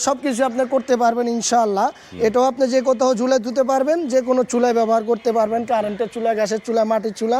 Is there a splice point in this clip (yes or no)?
no